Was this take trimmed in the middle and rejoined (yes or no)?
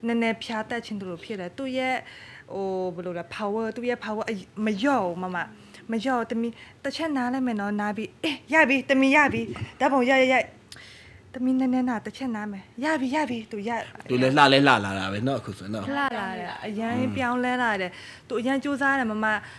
yes